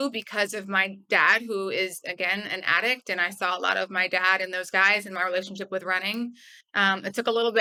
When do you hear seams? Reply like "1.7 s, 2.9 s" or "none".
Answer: none